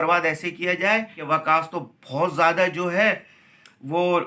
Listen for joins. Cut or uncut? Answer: cut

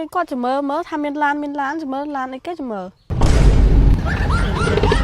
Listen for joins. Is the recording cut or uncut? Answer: cut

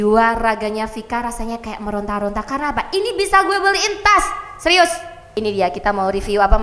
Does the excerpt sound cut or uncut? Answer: cut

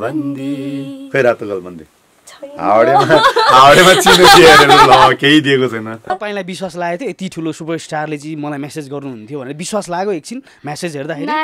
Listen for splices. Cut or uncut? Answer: cut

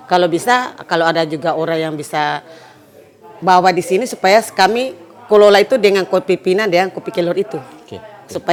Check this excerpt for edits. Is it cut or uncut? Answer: uncut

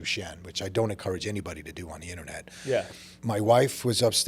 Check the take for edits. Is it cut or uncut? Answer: cut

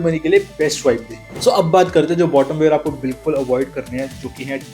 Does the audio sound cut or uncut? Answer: cut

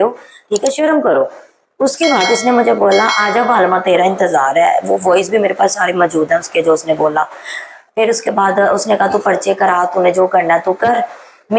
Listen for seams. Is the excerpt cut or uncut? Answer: uncut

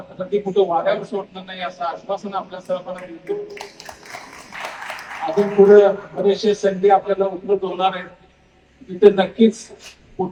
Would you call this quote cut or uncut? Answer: uncut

